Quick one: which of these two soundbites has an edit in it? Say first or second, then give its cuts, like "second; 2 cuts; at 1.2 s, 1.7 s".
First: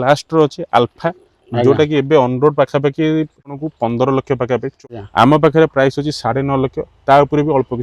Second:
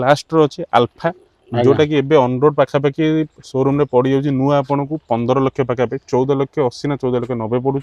first; 2 cuts; at 3.5 s, 4.8 s